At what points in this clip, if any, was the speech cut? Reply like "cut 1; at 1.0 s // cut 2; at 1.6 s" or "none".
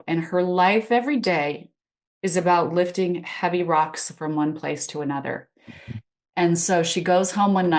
none